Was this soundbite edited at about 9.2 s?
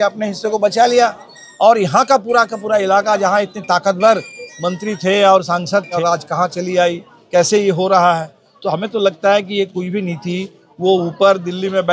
no; 1 cut; at 6.0 s

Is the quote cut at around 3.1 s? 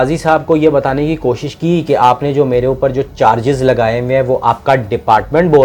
no; 0 cuts

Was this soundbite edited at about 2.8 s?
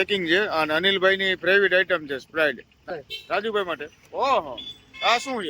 yes; 1 cut; at 2.8 s

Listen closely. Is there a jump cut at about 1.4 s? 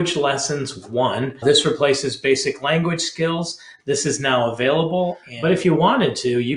yes; 2 cuts; at 1.4 s, 5.3 s

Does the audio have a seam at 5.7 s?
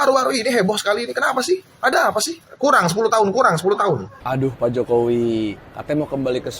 no; 2 cuts; at 2.4 s, 4.2 s

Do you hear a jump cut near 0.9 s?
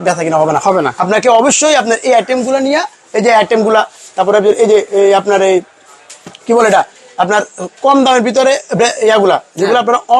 no; 0 cuts

